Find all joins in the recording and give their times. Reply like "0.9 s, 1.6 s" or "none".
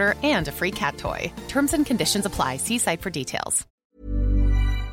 3.8 s